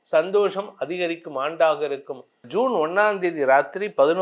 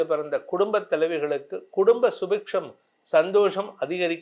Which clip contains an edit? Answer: first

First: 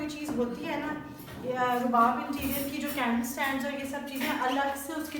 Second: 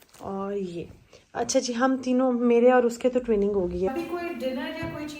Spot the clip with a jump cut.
second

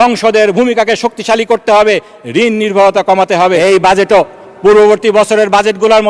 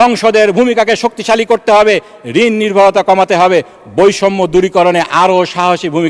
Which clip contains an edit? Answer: first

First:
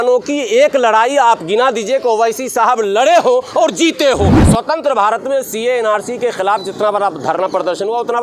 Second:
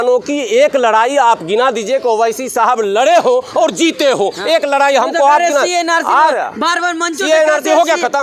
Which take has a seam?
first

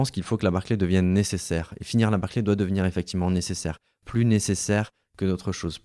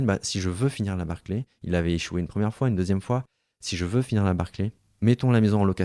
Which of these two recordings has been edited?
second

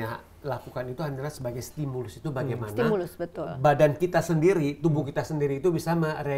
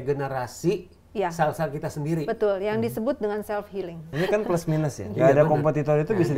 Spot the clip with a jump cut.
second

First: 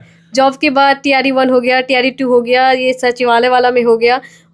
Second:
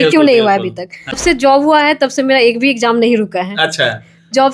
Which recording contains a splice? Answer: second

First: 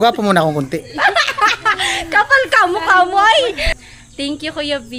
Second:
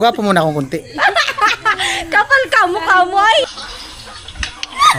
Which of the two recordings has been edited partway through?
second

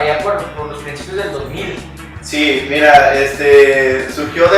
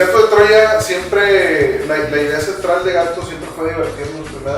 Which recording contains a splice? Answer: first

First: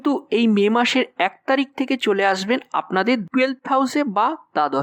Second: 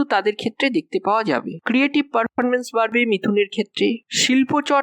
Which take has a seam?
second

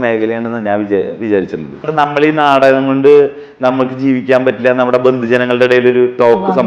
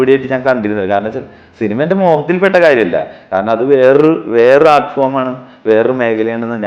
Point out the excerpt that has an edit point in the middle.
first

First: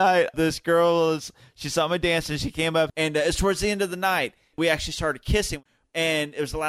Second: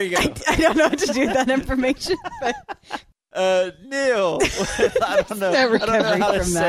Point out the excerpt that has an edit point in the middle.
first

